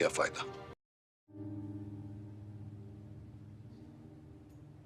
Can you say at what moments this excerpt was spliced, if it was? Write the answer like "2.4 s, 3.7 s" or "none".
0.9 s, 3.3 s